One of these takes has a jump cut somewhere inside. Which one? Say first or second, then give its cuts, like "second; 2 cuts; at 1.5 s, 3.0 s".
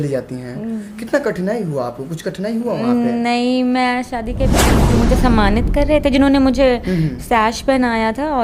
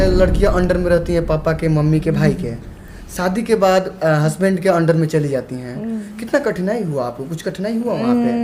first; 1 cut; at 4.7 s